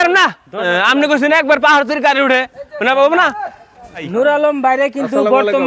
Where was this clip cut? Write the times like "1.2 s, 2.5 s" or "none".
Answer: 4.1 s